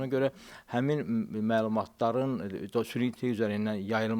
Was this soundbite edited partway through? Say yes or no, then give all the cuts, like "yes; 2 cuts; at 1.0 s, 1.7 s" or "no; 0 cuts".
no; 0 cuts